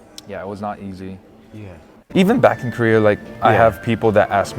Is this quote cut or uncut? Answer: cut